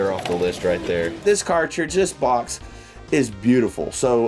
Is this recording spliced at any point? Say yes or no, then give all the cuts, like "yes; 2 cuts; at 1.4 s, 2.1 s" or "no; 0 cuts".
no; 0 cuts